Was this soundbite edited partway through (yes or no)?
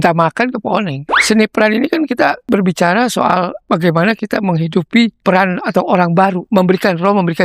yes